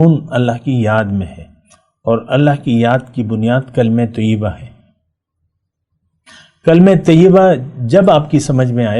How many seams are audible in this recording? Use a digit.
0